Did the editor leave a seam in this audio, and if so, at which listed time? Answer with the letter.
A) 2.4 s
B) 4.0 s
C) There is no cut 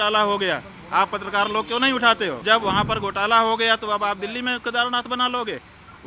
A